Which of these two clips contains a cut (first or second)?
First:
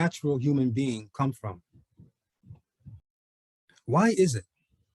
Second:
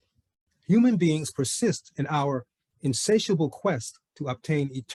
first